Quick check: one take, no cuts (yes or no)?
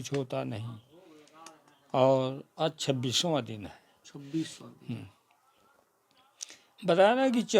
yes